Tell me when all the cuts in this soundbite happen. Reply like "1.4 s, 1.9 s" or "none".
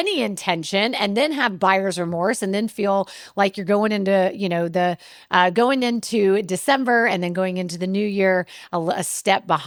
none